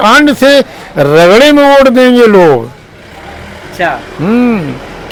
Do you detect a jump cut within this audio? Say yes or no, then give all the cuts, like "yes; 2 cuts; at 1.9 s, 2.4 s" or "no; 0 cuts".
no; 0 cuts